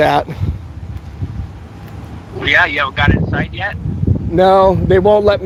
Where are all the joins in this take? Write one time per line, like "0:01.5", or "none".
none